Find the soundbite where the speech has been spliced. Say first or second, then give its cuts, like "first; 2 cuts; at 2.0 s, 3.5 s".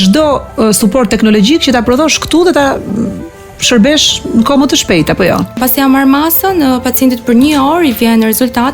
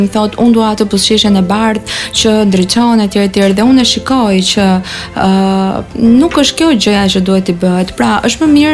first; 1 cut; at 5.6 s